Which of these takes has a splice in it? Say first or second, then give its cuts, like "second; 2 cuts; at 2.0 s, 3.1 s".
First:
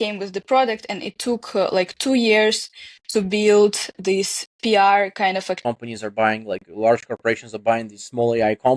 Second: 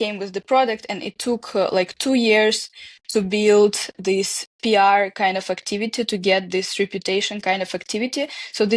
first; 1 cut; at 5.6 s